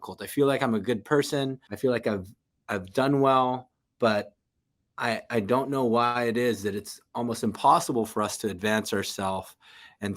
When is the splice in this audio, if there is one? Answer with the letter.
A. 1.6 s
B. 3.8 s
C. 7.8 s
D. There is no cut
A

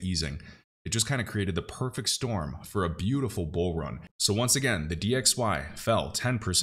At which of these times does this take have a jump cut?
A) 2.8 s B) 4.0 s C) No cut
B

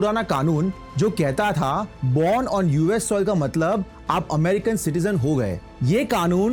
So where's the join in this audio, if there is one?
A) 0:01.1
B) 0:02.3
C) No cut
C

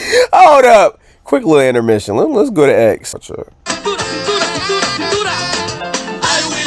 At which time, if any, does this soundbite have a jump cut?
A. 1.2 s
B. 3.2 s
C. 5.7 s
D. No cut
B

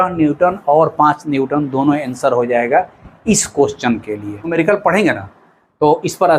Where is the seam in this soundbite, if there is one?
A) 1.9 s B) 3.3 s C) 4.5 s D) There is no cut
C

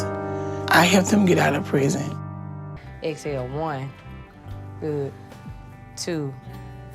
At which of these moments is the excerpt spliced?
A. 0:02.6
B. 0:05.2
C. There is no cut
C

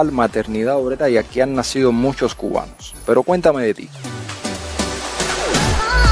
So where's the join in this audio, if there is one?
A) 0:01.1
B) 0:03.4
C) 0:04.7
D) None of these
D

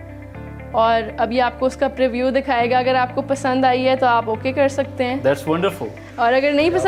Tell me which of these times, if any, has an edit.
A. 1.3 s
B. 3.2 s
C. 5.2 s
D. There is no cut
D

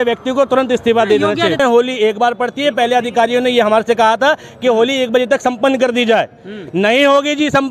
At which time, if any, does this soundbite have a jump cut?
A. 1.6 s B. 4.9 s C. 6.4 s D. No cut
A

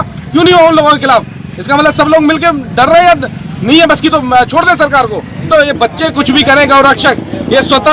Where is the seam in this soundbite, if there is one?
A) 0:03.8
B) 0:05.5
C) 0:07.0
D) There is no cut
B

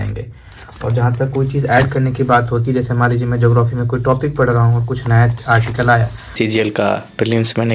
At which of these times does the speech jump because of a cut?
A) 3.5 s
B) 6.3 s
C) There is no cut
B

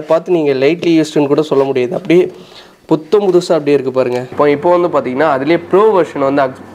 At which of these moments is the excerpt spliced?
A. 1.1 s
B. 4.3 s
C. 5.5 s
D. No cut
B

